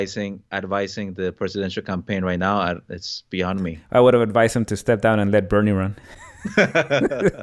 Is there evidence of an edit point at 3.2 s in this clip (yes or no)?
no